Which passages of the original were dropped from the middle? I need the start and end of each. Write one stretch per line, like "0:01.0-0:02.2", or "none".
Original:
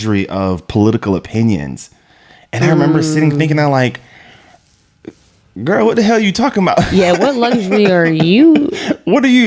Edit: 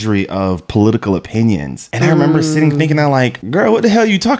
0:01.8-0:02.4
0:04.0-0:05.5